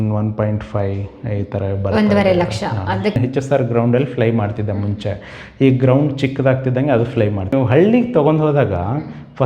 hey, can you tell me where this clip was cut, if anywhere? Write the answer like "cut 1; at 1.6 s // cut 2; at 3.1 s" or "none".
cut 1; at 3.2 s // cut 2; at 7.5 s

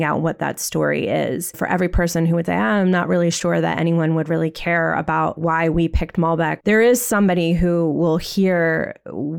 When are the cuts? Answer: cut 1; at 1.6 s // cut 2; at 5.4 s // cut 3; at 6.6 s

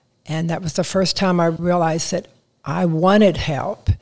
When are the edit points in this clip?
cut 1; at 1.6 s

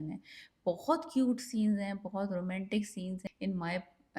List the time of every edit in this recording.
cut 1; at 3.3 s

